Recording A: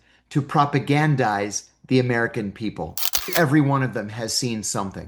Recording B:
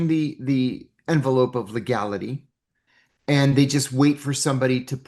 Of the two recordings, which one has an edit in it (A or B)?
A